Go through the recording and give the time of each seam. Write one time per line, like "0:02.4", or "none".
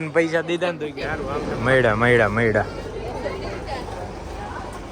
0:01.5